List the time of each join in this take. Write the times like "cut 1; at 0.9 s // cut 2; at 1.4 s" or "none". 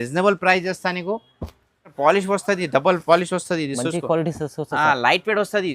cut 1; at 1.9 s